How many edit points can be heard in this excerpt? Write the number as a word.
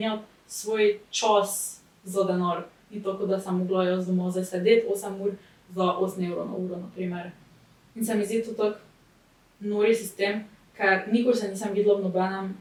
zero